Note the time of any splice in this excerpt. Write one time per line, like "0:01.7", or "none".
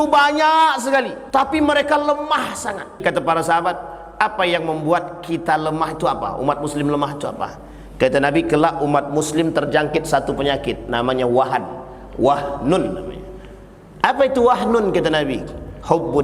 0:01.2
0:03.0